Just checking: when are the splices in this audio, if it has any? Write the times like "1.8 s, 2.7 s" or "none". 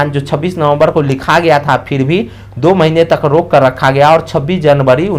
none

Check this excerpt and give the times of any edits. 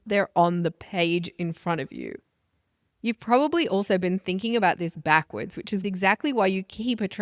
5.8 s

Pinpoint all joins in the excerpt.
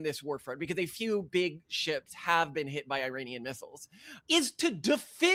none

